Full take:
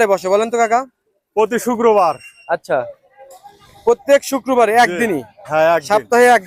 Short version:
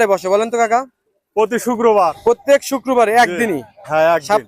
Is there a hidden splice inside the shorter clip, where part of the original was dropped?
yes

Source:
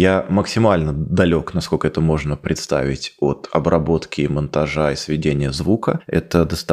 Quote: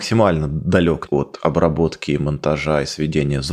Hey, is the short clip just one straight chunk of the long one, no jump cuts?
no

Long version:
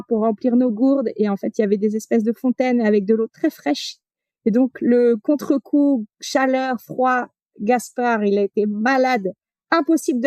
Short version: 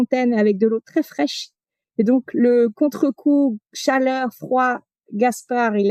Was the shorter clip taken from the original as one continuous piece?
yes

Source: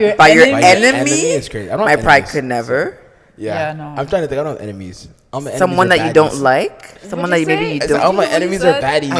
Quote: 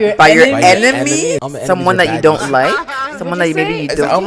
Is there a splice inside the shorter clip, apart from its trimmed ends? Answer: yes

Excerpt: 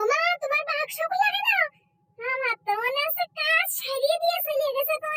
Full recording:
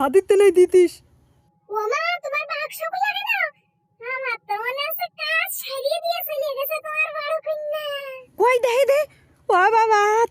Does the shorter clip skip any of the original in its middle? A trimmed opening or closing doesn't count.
no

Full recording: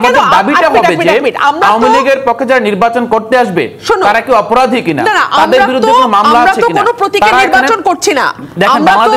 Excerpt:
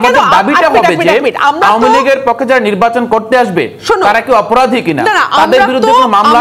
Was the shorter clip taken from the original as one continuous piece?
yes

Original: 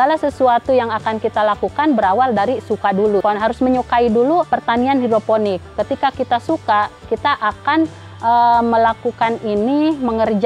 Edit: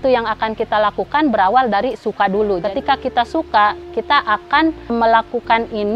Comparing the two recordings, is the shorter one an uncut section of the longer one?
no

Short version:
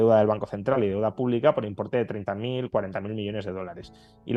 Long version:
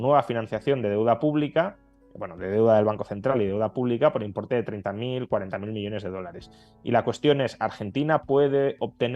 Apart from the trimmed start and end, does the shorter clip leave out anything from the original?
no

